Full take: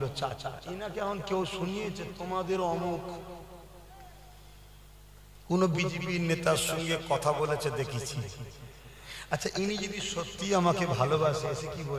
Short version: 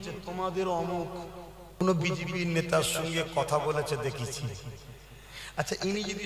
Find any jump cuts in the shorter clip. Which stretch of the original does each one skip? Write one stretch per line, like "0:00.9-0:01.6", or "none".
0:03.7-0:05.5